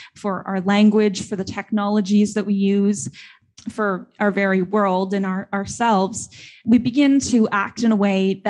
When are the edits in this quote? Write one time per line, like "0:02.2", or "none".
0:06.6